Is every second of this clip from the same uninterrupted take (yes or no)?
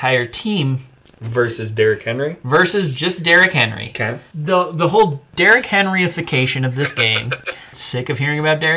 no